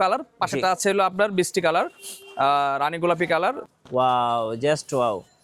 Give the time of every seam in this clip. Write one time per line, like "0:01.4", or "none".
0:03.6